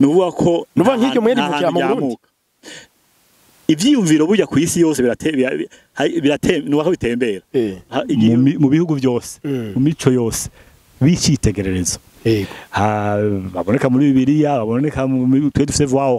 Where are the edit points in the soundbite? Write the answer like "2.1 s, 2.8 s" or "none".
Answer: 8.1 s